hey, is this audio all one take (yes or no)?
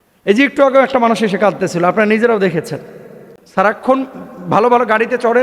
no